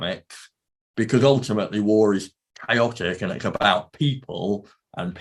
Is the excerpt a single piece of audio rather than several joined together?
yes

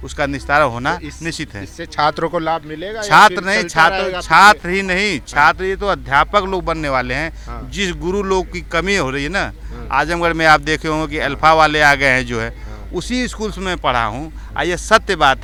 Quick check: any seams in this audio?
no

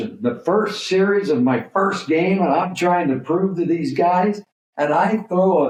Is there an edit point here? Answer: no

